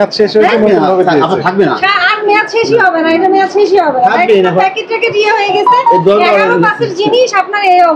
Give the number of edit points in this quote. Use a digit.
0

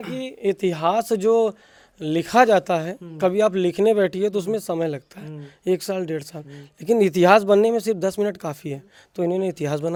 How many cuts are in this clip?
0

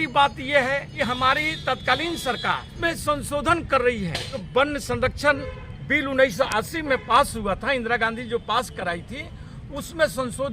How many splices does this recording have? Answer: 3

